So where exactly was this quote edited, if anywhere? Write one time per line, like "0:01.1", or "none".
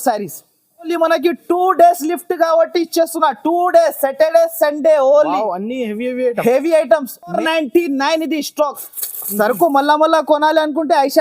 0:00.9
0:07.4